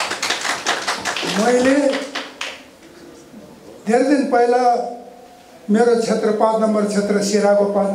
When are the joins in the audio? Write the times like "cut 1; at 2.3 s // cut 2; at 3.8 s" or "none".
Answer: none